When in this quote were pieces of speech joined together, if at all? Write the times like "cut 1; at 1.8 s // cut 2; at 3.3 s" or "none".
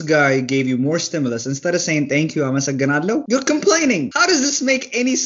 cut 1; at 3.2 s // cut 2; at 4.1 s